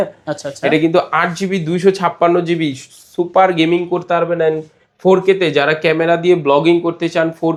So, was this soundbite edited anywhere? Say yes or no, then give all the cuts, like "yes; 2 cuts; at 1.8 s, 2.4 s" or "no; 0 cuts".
no; 0 cuts